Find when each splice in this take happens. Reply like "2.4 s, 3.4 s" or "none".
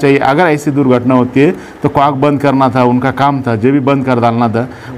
none